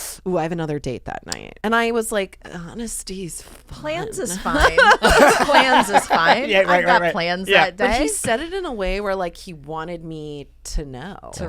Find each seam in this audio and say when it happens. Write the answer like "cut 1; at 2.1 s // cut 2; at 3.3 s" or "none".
cut 1; at 1.4 s

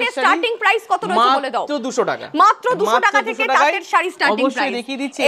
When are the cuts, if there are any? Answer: none

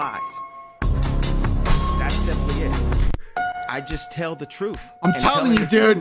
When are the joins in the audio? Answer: none

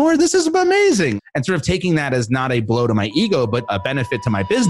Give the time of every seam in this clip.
cut 1; at 1.2 s // cut 2; at 3.7 s

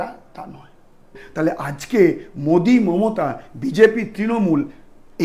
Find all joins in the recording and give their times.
cut 1; at 1.2 s

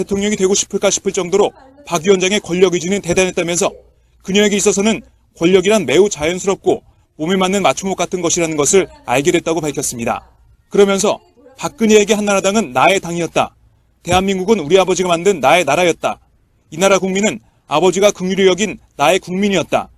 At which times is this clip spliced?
cut 1; at 11.6 s

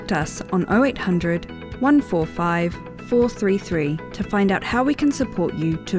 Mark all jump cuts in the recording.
none

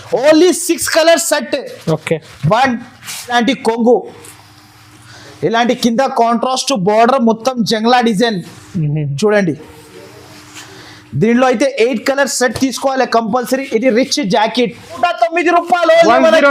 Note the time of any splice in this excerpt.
cut 1; at 3.3 s // cut 2; at 15.0 s

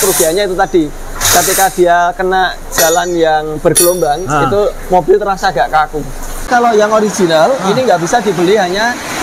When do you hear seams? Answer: cut 1; at 6.4 s

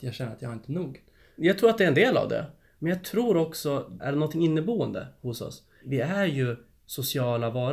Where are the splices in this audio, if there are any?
cut 1; at 1.3 s // cut 2; at 4.0 s // cut 3; at 5.8 s

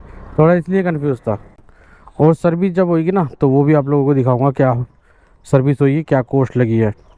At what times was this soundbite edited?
cut 1; at 1.4 s

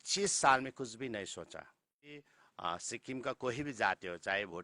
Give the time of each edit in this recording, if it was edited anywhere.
cut 1; at 2.3 s

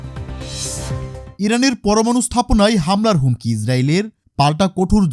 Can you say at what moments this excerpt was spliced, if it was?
cut 1; at 1.3 s

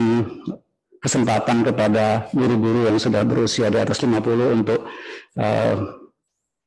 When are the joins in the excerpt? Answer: none

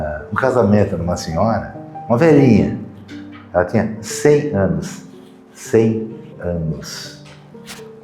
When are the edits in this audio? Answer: none

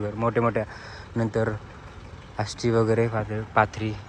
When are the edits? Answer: none

